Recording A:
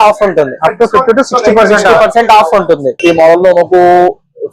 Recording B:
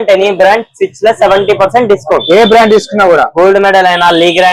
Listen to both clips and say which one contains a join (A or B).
A